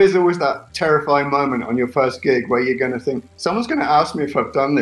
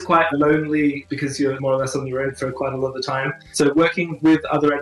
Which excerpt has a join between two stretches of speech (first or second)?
second